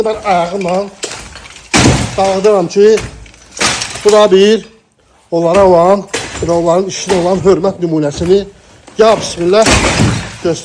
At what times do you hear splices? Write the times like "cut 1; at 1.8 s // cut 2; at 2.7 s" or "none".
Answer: none